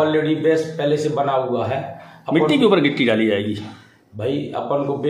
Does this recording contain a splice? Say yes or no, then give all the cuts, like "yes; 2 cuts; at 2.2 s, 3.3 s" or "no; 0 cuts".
no; 0 cuts